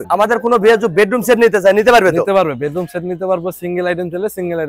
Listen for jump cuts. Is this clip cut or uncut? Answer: uncut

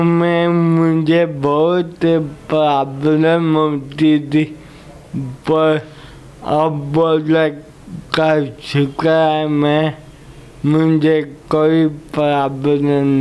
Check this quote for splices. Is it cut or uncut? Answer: uncut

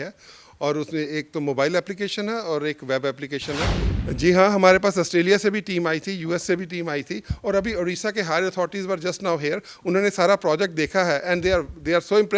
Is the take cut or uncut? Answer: cut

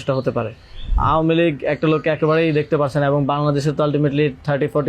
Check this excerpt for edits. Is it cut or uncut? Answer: cut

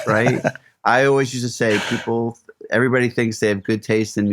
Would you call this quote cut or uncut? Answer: uncut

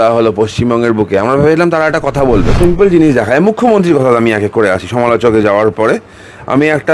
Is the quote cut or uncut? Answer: cut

